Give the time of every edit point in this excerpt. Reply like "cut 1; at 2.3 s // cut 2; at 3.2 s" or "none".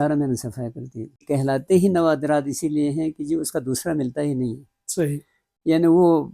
cut 1; at 1.2 s